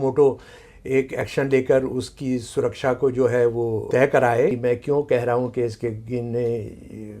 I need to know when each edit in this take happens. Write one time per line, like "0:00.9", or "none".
0:03.9
0:04.6